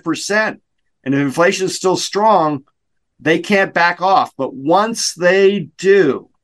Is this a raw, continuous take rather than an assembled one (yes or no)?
yes